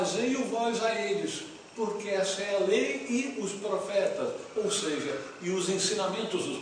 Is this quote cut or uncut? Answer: cut